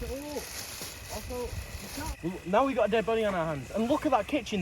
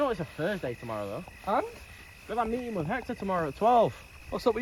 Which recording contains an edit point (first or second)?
first